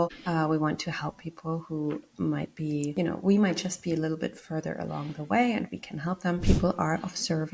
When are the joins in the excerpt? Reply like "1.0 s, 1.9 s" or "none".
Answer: 2.9 s, 6.4 s